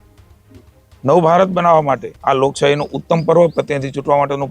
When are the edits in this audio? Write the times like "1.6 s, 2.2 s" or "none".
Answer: 2.1 s